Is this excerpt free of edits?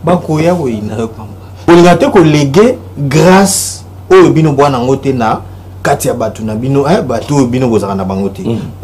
no; 1 cut; at 1.6 s

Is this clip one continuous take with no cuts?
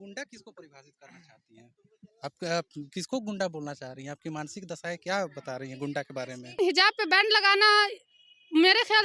no; 1 cut; at 6.6 s

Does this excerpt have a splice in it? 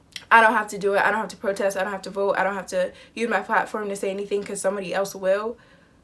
no; 0 cuts

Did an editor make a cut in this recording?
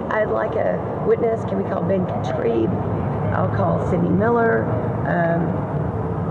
no; 0 cuts

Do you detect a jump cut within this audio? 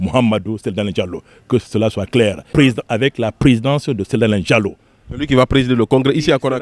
yes; 1 cut; at 2.5 s

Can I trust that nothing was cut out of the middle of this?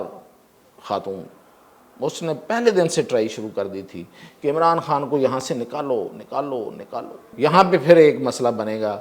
no; 1 cut; at 7.3 s

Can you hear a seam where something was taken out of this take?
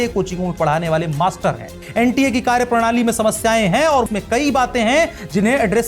yes; 2 cuts; at 1.7 s, 4.1 s

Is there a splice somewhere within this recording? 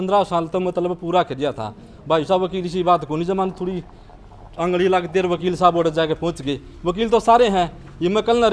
no; 0 cuts

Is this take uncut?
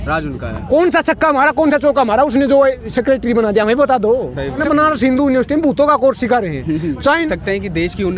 no; 2 cuts; at 4.6 s, 7.3 s

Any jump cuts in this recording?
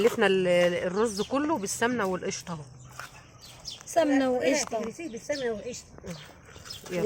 no; 0 cuts

